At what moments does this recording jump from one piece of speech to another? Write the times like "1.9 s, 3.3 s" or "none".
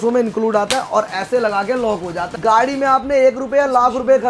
2.2 s